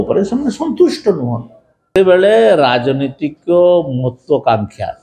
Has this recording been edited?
yes; 1 cut; at 2.0 s

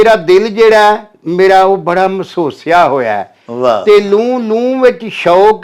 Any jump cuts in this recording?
no; 0 cuts

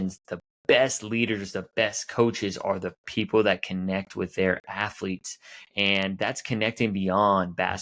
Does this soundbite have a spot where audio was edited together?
no; 0 cuts

